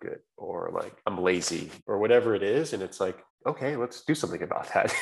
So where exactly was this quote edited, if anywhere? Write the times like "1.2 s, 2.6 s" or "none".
0.9 s, 1.7 s, 3.3 s